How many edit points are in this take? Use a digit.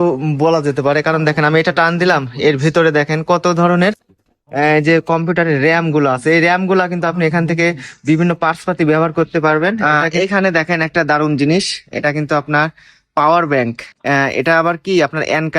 1